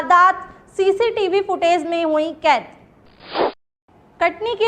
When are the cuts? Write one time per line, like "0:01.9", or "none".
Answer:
0:03.4